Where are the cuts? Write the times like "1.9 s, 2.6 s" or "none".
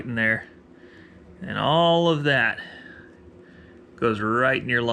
none